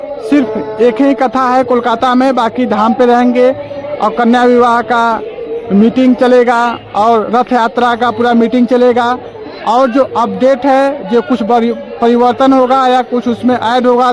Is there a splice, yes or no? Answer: no